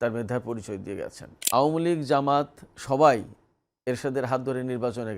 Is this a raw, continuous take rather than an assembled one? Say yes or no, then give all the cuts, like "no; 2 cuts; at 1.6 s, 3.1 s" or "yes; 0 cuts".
no; 1 cut; at 1.3 s